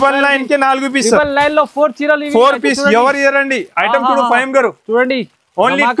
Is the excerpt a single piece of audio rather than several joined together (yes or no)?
yes